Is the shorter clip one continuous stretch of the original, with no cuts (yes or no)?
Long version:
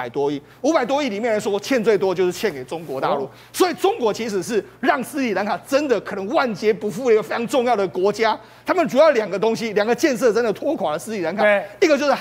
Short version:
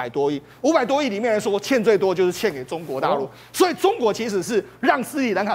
yes